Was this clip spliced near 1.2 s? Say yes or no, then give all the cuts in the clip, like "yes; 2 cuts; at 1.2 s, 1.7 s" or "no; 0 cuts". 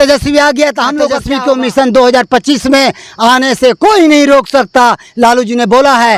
yes; 1 cut; at 1.2 s